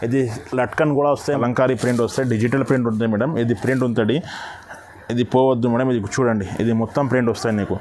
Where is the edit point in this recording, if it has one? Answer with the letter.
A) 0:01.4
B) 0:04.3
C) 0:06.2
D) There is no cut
A